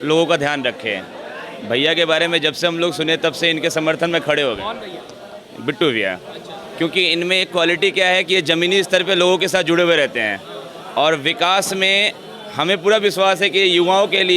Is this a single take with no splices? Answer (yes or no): yes